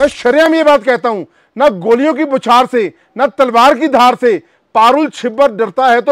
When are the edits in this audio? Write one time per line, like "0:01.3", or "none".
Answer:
none